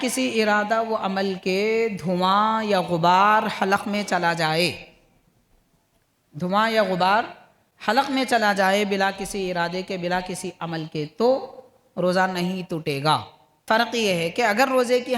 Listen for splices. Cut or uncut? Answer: cut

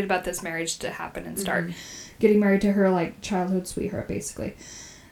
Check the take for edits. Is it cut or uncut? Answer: uncut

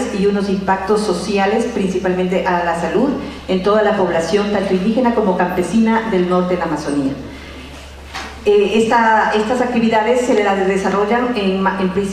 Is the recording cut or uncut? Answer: uncut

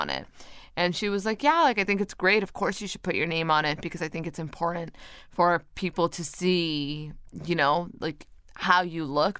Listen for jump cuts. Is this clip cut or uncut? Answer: uncut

